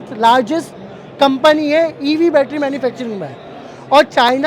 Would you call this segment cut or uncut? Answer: uncut